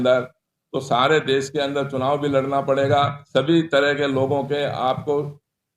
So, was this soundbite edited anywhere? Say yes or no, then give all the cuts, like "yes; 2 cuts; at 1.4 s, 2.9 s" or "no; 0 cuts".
yes; 1 cut; at 3.2 s